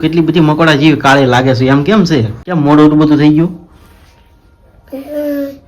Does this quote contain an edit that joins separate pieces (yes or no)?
yes